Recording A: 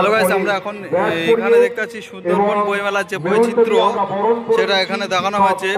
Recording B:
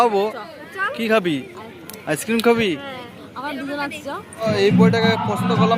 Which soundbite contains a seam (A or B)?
B